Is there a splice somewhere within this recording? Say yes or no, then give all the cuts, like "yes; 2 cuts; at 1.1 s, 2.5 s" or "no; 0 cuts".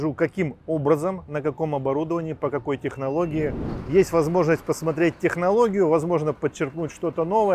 yes; 1 cut; at 3.7 s